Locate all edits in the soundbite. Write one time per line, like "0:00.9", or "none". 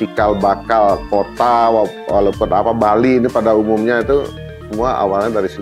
none